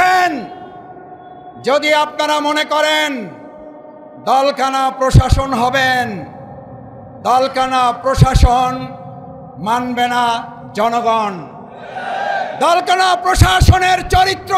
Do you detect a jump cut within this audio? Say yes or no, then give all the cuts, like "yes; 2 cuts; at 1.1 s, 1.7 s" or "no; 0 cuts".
no; 0 cuts